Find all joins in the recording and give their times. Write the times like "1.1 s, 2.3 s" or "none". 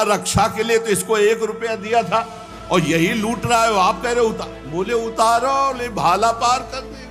none